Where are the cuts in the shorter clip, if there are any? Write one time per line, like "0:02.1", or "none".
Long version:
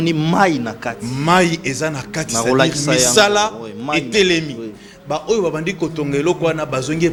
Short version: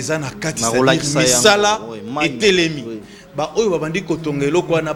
none